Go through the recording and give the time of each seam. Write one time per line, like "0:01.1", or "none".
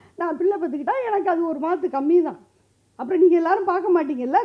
none